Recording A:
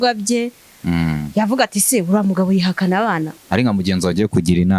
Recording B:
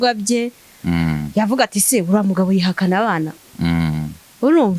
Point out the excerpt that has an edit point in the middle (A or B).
A